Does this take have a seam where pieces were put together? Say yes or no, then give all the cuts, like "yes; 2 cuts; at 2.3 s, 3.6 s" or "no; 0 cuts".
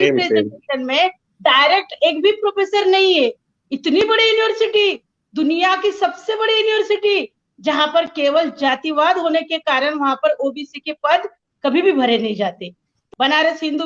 yes; 1 cut; at 13.0 s